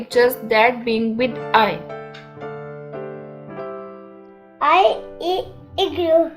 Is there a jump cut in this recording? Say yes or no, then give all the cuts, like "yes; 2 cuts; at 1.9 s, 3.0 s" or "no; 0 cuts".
yes; 2 cuts; at 1.8 s, 4.5 s